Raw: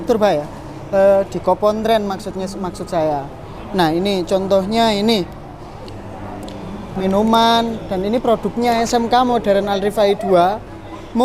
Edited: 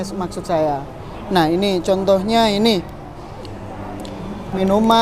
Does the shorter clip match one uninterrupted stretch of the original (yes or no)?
yes